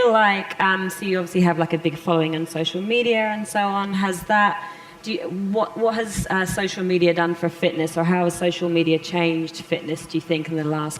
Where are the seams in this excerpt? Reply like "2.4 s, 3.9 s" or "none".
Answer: 1.7 s